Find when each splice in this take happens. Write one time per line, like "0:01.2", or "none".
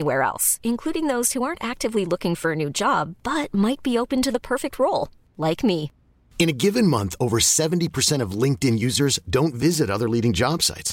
none